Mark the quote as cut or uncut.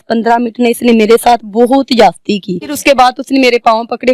cut